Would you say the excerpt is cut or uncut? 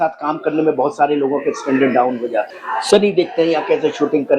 cut